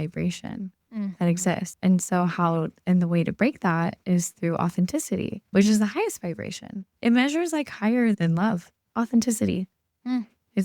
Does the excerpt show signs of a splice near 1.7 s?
yes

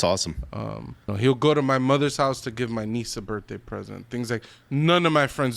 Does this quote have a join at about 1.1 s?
yes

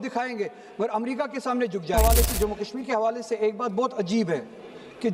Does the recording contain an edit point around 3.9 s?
no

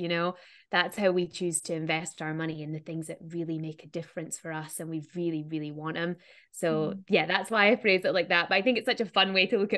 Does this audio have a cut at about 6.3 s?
no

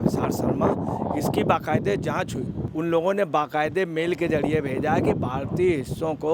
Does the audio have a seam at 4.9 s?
no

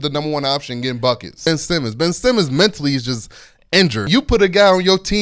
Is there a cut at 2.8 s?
no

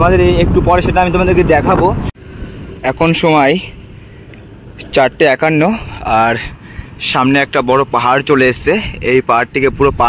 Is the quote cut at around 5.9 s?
no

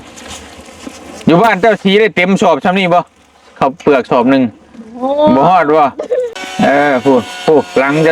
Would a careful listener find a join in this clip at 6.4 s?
yes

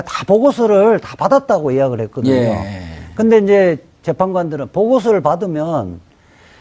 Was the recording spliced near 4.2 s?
no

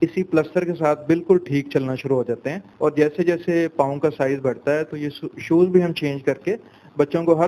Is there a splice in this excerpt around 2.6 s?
yes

